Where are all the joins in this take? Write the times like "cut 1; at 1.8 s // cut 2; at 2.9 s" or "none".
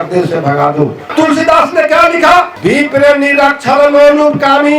cut 1; at 1.0 s // cut 2; at 2.5 s